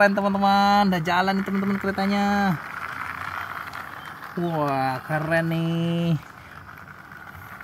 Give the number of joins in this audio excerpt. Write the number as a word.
zero